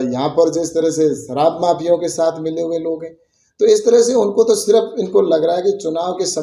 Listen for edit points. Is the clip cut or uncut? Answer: uncut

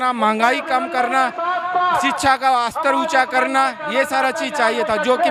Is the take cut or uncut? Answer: uncut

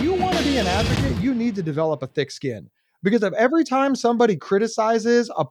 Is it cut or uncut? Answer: uncut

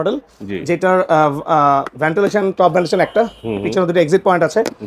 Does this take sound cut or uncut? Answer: uncut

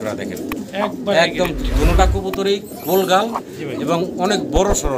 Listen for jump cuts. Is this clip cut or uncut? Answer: uncut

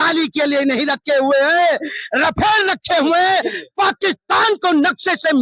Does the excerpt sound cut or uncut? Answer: uncut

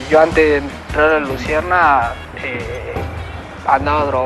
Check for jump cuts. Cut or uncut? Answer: uncut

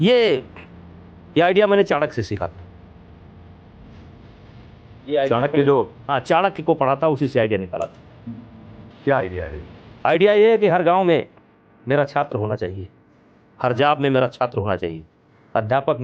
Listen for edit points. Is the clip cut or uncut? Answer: uncut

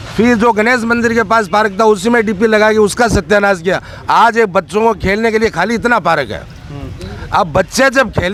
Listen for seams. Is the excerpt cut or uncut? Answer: uncut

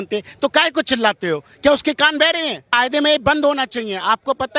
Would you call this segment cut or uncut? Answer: cut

